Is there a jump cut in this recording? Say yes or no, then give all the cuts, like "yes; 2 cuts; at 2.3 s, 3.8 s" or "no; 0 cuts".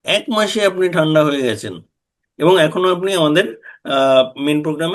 no; 0 cuts